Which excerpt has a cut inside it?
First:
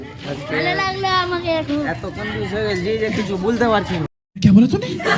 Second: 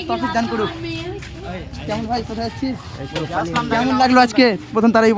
first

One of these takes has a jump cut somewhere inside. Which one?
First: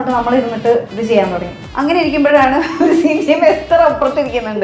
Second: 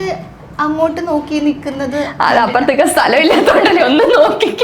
first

